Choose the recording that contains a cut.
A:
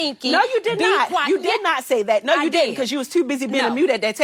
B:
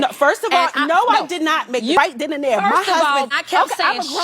B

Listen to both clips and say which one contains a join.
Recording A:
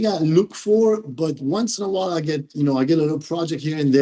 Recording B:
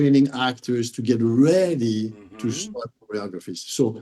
B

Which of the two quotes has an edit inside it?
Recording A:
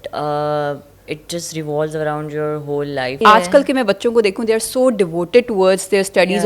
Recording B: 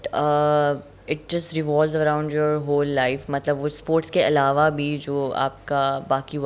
A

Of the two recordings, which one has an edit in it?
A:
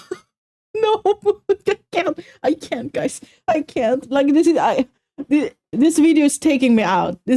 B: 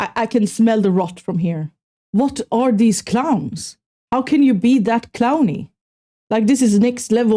B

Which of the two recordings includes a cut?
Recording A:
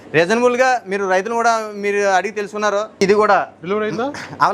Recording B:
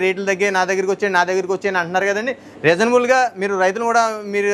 A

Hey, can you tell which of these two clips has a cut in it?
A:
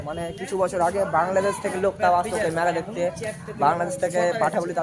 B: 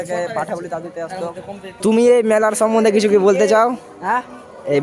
B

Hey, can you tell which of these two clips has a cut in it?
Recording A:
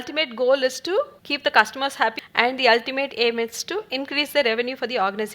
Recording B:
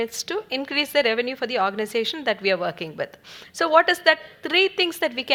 A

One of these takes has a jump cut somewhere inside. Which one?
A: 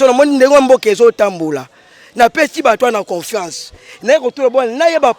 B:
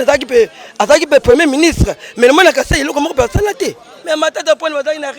B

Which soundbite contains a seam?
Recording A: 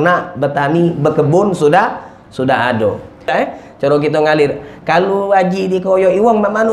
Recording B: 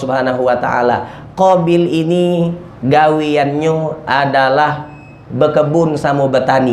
A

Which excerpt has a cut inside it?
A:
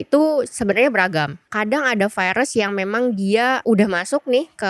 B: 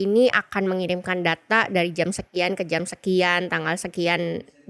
A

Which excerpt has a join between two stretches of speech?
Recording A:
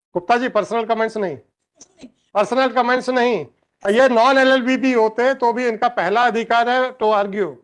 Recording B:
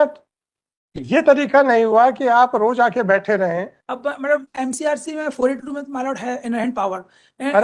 B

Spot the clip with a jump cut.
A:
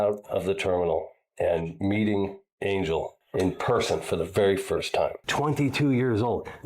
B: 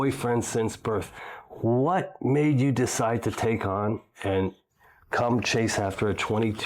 A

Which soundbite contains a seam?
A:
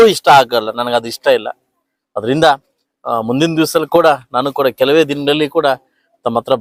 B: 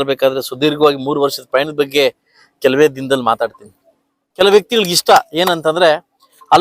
B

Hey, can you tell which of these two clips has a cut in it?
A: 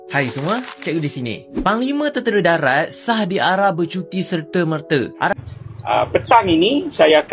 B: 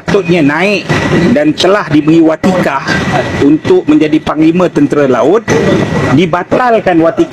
A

